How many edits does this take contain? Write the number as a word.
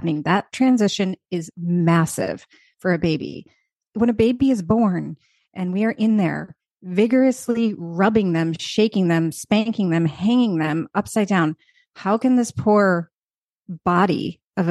one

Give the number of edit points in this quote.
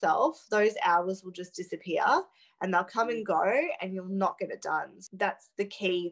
one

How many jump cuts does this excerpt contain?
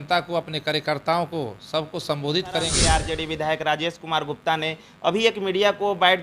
one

